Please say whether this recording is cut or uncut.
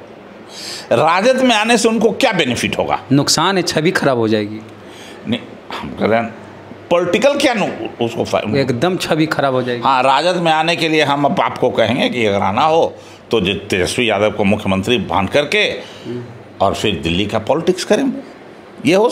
uncut